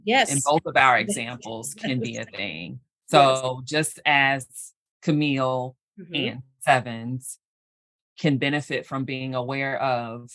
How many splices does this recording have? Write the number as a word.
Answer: zero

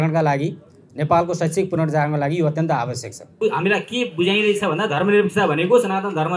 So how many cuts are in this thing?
one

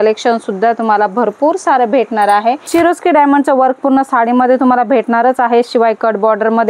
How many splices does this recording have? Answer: one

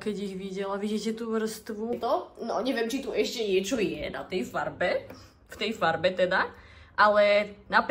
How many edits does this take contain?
one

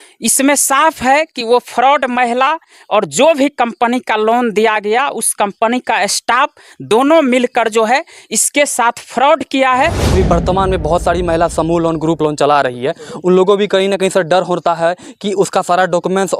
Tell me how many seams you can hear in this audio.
one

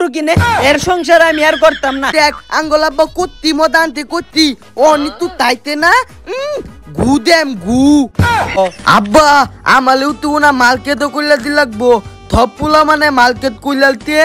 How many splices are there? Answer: two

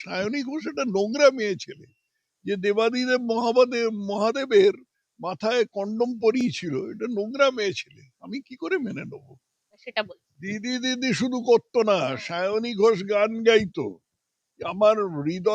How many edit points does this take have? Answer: one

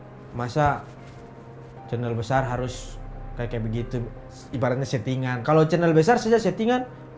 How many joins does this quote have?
one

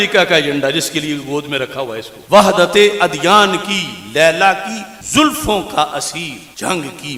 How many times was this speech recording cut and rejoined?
zero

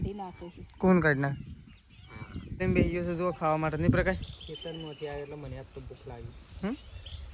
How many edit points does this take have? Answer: one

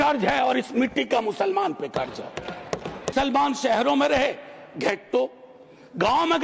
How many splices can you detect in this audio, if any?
one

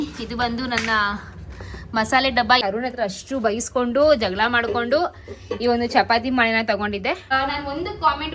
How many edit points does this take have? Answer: two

